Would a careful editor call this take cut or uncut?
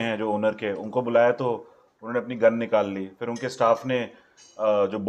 uncut